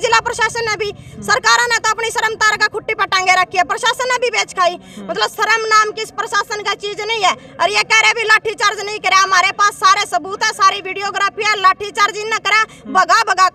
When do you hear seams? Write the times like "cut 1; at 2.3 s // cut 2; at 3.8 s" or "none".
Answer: none